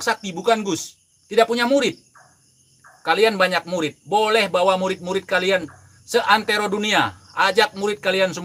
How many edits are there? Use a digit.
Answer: 0